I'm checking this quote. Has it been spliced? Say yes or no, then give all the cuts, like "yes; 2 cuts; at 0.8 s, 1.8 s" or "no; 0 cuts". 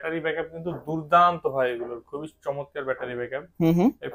no; 0 cuts